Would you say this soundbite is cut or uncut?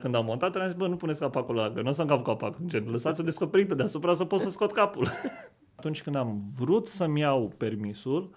cut